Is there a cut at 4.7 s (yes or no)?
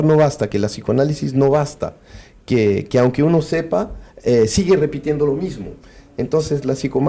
no